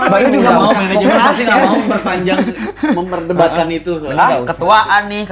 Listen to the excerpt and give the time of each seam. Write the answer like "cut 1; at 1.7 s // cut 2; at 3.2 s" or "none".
none